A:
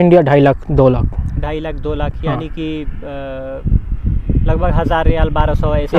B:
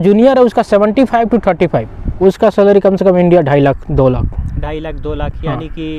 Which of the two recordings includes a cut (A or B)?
B